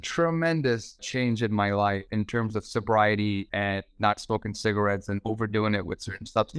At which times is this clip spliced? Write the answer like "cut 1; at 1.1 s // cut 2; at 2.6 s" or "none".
cut 1; at 1.1 s // cut 2; at 2.0 s // cut 3; at 3.5 s // cut 4; at 5.3 s